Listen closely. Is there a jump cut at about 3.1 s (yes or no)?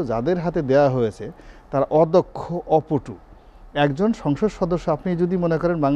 no